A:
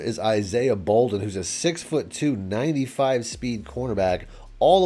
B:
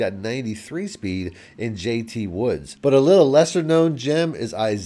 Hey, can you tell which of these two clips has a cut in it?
B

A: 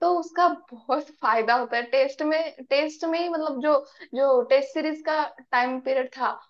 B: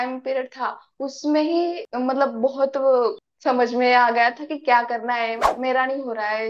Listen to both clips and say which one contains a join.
B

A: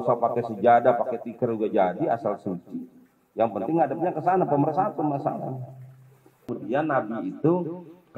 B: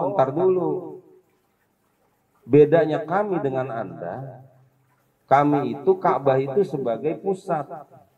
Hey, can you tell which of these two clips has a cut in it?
A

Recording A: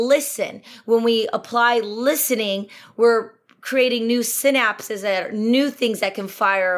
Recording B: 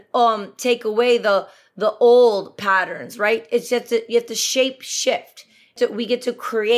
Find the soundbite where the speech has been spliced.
B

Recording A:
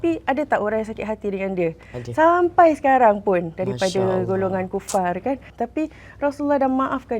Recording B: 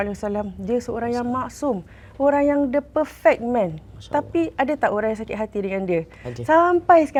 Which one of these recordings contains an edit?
A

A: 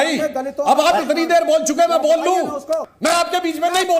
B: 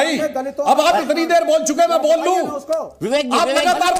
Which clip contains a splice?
A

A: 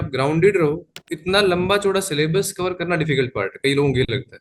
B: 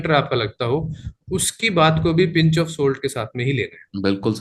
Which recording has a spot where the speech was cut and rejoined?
A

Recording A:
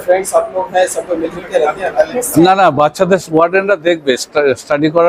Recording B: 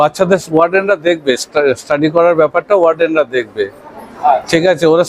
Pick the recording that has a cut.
A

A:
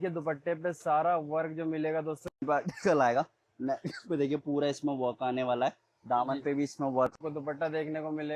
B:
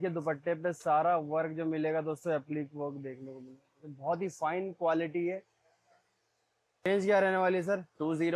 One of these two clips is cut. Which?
A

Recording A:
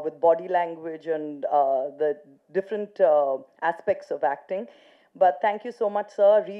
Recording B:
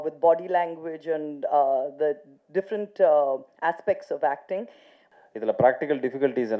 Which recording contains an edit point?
B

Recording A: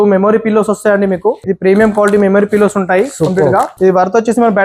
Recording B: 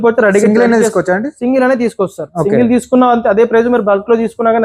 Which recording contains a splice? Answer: A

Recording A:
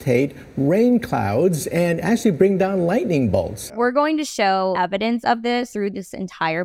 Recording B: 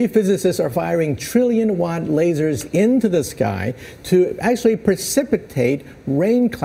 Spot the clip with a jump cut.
A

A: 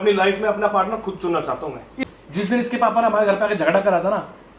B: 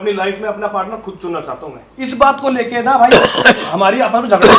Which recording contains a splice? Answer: A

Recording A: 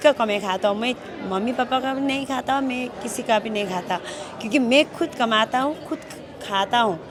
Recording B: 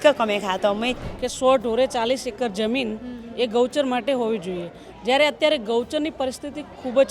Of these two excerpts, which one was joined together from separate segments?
B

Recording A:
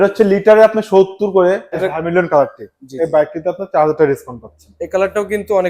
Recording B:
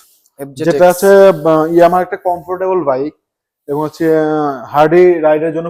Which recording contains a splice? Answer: A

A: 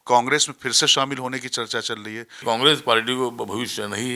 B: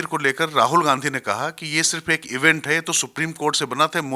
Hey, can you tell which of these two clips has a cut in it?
A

